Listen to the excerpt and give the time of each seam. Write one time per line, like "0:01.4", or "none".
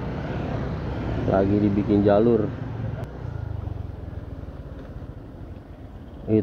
0:03.0

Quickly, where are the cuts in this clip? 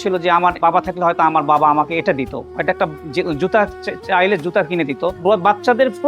0:02.4

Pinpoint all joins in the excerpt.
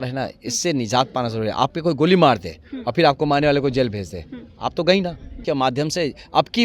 0:05.4

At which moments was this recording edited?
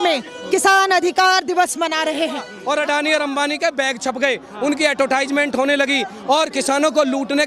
0:02.5

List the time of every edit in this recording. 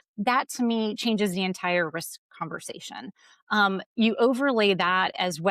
none

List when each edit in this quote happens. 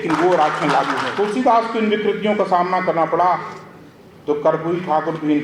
0:01.0

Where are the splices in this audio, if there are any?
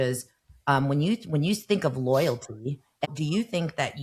0:03.1

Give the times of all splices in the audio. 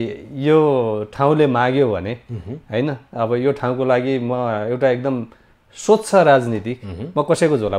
none

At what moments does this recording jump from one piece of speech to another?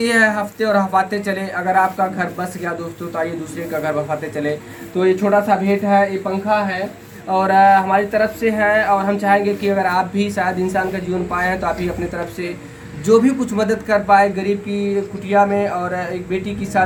none

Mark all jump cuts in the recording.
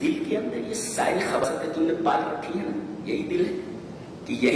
0:01.4

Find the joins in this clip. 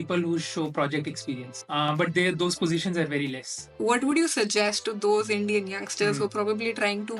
0:01.5
0:03.6

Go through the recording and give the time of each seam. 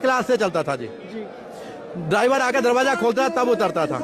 none

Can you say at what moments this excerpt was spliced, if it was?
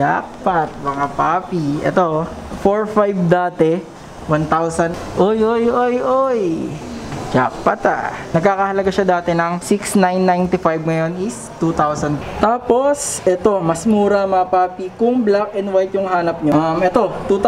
0:05.0
0:08.2
0:09.6
0:12.2
0:16.5

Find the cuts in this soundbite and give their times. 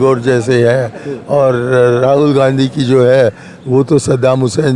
none

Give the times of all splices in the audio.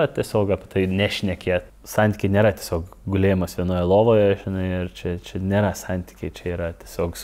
0:01.7

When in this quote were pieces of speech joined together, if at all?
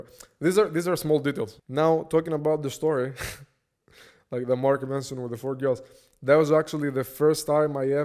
0:01.6

